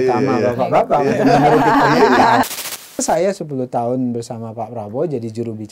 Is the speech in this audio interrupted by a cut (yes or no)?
yes